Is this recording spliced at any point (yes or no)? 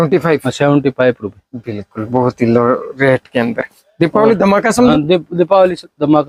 no